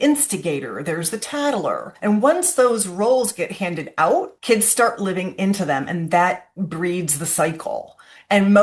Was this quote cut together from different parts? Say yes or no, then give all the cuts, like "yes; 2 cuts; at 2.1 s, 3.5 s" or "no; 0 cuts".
yes; 2 cuts; at 1.9 s, 4.3 s